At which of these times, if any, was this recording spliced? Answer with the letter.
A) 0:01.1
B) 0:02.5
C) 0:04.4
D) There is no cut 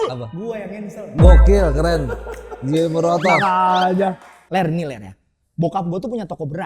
C